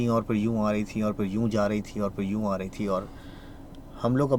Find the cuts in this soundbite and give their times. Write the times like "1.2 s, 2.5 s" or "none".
none